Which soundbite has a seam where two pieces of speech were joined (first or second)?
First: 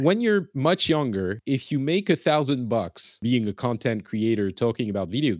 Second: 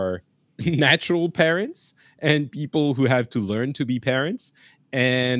first